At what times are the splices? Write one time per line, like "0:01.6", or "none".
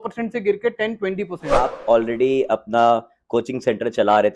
0:01.4